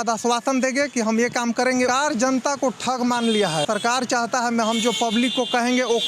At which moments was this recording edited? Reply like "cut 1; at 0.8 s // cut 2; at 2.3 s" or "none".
cut 1; at 1.9 s // cut 2; at 3.6 s